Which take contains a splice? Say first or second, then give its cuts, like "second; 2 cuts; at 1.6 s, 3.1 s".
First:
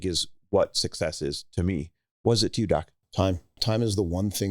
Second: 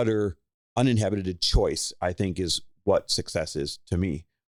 first; 1 cut; at 3.6 s